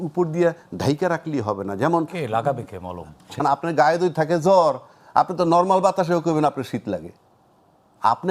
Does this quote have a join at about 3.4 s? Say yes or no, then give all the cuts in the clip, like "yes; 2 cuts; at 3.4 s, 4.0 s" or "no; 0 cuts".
yes; 1 cut; at 3.4 s